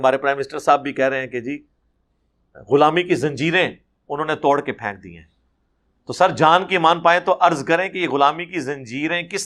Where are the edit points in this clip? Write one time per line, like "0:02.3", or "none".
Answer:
none